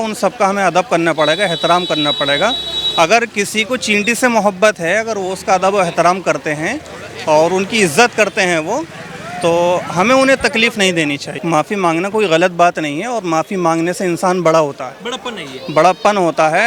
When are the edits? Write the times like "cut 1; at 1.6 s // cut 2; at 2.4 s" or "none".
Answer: cut 1; at 11.3 s